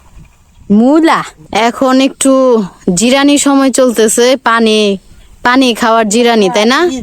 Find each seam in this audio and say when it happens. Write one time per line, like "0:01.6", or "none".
0:01.4